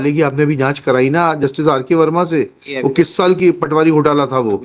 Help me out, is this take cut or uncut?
uncut